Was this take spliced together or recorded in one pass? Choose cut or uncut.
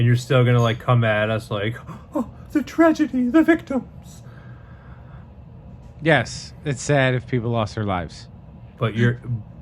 cut